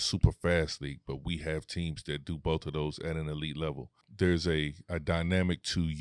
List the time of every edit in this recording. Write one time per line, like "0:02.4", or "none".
0:04.0